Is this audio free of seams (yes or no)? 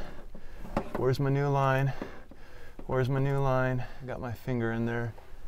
no